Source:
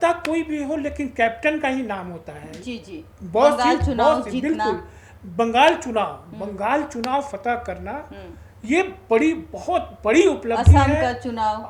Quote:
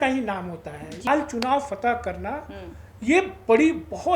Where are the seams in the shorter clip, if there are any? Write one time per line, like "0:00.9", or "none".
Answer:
0:01.0